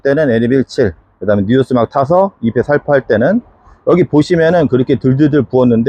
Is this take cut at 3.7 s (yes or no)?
no